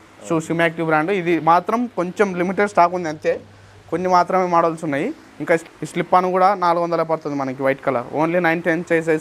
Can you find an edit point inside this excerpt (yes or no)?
no